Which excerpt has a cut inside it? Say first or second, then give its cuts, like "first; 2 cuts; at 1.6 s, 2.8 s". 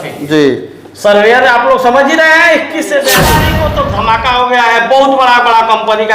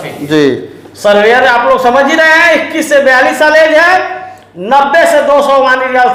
first; 1 cut; at 3.2 s